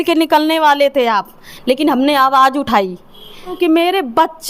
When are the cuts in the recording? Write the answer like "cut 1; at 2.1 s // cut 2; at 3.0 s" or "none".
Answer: cut 1; at 3.5 s